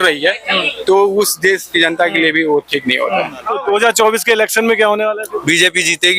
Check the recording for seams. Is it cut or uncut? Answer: cut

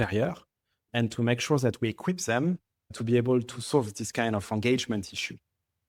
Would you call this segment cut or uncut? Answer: uncut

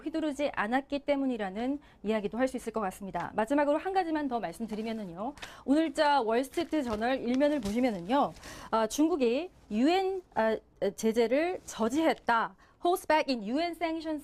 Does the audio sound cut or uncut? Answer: uncut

